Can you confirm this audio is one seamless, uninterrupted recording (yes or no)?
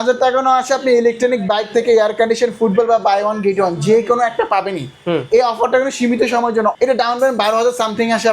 no